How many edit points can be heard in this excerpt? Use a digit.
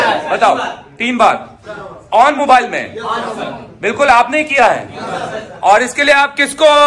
0